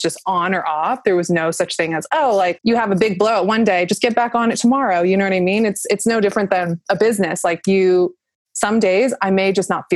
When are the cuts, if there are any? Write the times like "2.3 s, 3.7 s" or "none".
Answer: 2.6 s

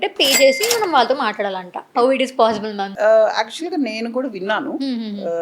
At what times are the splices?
1.8 s, 2.9 s

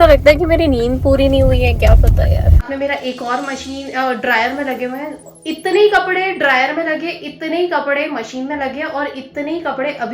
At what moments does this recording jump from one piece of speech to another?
2.7 s

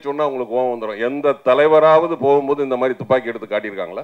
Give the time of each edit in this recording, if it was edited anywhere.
none

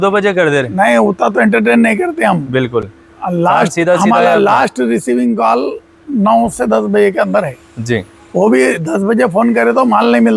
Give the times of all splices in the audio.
none

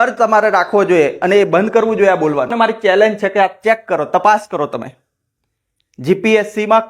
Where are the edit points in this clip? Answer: 2.5 s

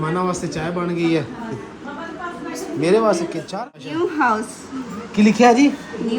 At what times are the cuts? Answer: 3.6 s

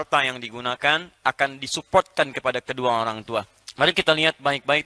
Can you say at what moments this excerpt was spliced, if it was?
3.6 s

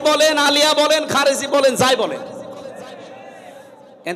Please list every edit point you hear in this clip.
none

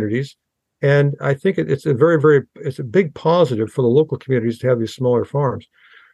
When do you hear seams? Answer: none

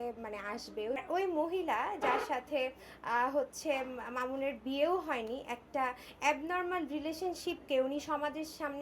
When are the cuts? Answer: 1.0 s

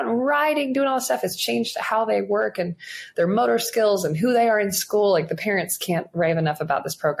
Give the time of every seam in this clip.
none

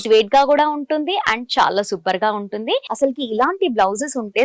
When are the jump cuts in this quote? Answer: 2.9 s

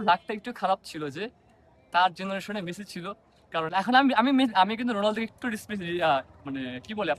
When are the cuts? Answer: none

